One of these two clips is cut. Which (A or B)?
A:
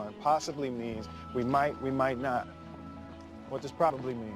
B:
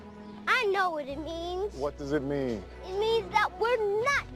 A